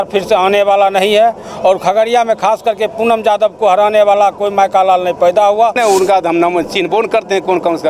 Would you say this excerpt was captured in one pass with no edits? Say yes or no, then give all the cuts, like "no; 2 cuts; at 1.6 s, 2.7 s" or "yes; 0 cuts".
no; 1 cut; at 5.8 s